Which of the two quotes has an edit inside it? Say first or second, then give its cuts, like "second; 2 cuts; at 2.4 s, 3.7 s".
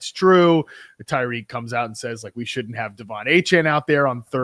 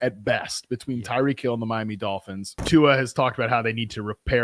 second; 1 cut; at 2.6 s